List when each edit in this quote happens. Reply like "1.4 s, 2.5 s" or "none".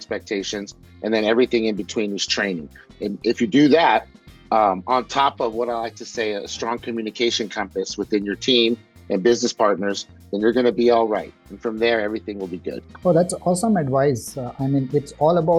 none